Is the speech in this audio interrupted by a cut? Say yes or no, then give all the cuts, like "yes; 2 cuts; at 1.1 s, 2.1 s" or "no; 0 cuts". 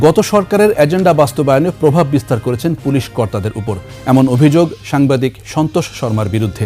yes; 1 cut; at 3.9 s